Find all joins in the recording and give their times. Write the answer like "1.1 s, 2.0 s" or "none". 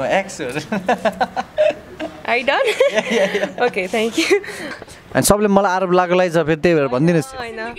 4.7 s